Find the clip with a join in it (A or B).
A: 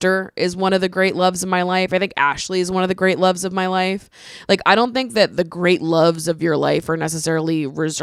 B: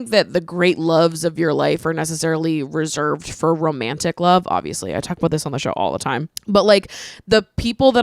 B